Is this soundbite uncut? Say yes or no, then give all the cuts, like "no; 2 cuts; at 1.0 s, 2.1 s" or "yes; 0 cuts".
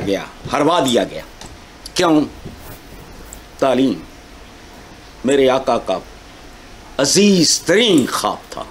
yes; 0 cuts